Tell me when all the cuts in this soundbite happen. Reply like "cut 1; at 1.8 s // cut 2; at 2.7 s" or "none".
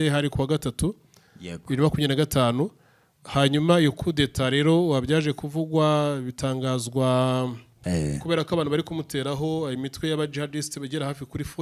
cut 1; at 7.7 s